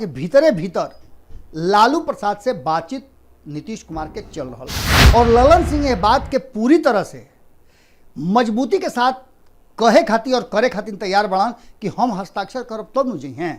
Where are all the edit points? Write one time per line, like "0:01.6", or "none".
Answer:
0:04.9